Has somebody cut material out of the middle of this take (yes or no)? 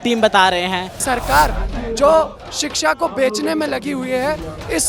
yes